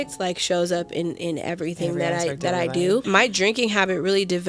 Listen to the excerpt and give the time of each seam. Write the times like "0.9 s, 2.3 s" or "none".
3.0 s